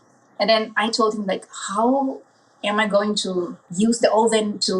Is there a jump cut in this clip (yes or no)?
yes